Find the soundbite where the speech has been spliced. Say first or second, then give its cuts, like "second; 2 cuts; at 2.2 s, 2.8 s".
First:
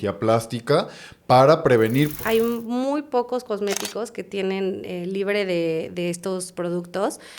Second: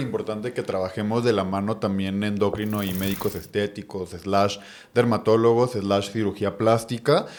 first; 1 cut; at 2.1 s